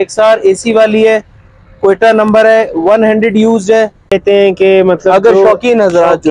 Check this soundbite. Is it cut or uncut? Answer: cut